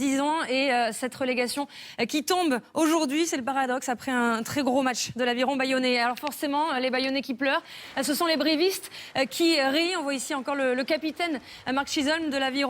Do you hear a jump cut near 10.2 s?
yes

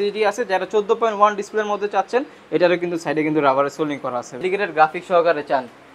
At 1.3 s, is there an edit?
no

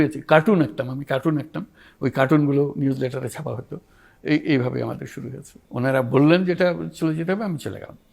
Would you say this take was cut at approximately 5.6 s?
yes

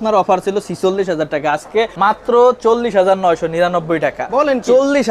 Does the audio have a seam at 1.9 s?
yes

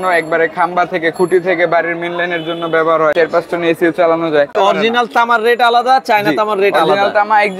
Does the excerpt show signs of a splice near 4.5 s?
yes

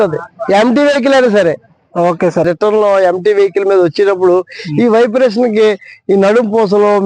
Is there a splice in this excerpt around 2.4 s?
yes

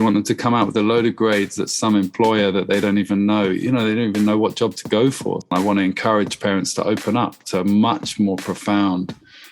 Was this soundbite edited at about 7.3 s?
no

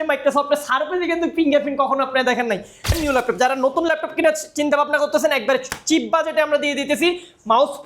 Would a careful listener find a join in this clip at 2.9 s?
yes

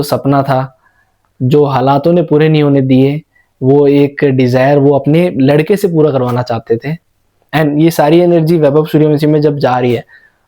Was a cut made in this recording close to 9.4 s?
no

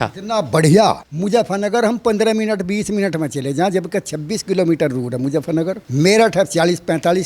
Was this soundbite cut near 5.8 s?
yes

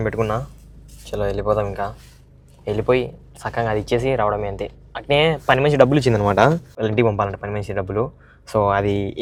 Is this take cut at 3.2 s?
no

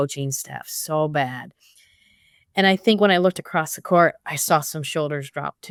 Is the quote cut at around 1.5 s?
no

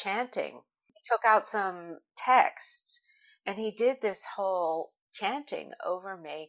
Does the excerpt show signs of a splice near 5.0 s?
yes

